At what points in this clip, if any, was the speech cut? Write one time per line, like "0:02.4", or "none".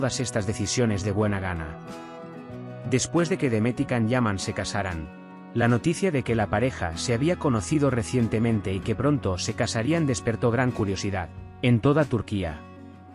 0:01.6
0:02.8